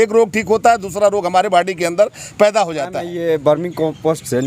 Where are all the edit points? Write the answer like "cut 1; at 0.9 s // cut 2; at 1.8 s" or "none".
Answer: cut 1; at 3.1 s